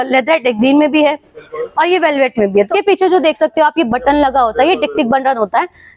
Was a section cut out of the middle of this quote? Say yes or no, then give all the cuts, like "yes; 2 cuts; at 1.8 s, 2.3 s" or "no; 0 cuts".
yes; 1 cut; at 2.7 s